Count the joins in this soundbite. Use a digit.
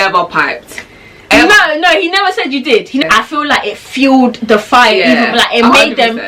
1